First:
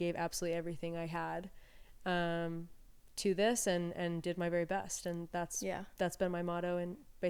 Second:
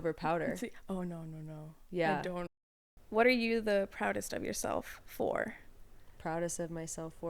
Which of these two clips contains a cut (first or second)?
second